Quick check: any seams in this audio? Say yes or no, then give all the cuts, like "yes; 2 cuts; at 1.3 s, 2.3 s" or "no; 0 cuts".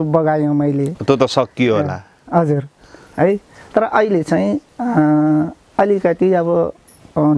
no; 0 cuts